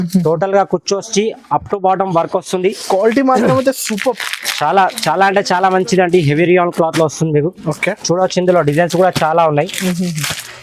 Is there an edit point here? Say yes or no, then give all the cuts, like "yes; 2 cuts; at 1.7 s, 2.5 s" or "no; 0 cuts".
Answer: no; 0 cuts